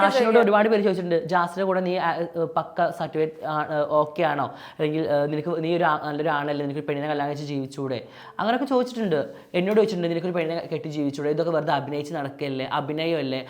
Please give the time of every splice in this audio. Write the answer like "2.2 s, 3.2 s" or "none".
none